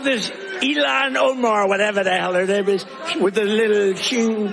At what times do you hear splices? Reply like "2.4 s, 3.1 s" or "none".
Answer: 3.0 s